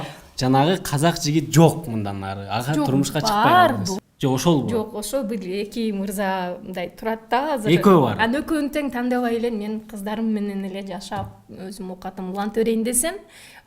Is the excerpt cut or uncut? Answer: cut